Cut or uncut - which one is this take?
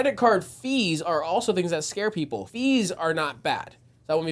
cut